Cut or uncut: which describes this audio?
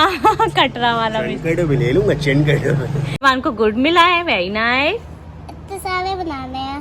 cut